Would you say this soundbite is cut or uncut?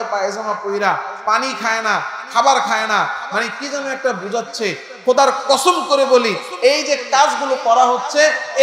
uncut